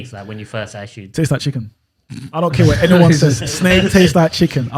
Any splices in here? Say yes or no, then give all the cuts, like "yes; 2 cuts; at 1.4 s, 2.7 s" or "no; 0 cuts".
no; 0 cuts